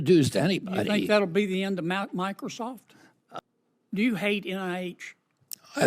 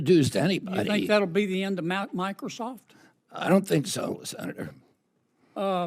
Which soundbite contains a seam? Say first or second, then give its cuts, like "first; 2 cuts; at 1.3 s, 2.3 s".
first; 1 cut; at 3.4 s